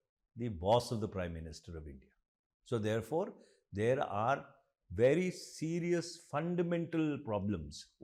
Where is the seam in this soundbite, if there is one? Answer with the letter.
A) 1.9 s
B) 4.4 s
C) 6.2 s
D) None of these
D